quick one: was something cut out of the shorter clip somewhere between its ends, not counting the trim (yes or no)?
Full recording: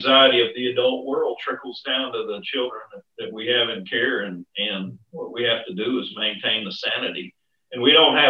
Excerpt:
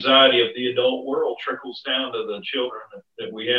no